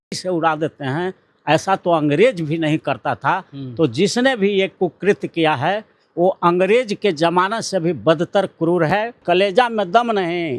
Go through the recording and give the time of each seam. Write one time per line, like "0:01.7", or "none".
0:09.2